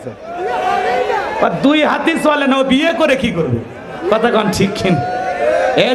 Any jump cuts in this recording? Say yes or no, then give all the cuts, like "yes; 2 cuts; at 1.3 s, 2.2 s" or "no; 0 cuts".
no; 0 cuts